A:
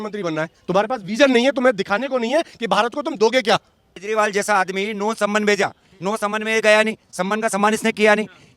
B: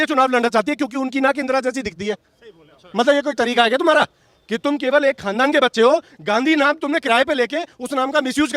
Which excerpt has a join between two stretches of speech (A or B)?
A